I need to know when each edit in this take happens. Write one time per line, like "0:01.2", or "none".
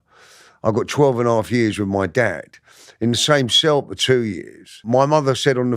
0:04.7